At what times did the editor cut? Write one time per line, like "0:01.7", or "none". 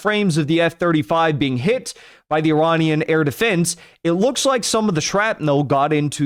none